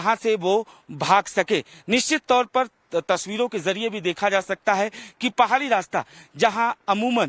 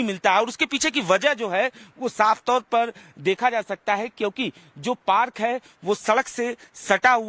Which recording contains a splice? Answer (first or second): second